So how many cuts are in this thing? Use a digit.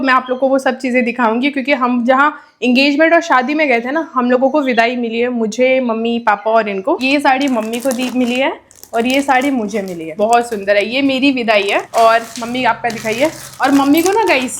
3